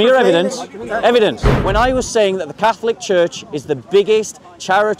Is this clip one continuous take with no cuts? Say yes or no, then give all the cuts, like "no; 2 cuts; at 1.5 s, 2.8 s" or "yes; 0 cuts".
no; 1 cut; at 1.5 s